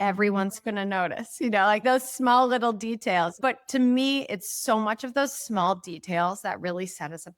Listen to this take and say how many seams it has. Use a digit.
1